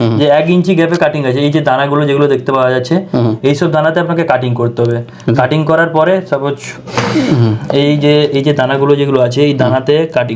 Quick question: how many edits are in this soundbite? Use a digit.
0